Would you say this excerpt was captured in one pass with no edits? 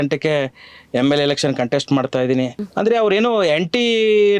no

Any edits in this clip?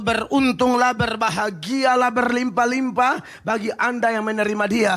no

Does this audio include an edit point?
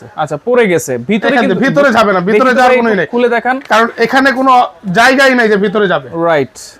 no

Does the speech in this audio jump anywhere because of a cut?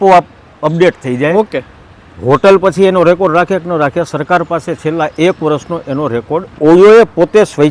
yes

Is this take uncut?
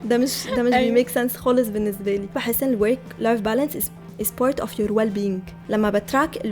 no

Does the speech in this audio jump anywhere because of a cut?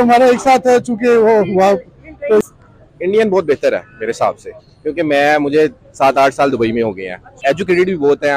yes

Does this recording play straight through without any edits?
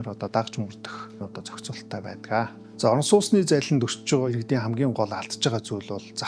no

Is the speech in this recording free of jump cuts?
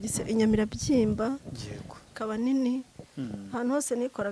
yes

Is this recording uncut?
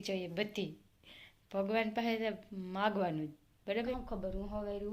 no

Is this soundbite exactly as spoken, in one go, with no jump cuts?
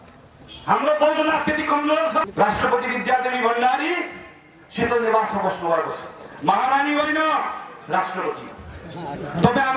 no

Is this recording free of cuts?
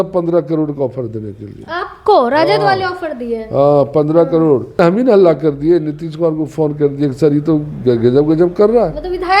no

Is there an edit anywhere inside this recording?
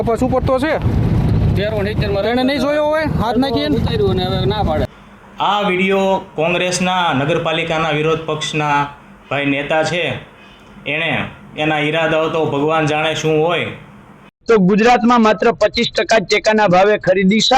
yes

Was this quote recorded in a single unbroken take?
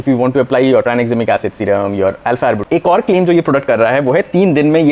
no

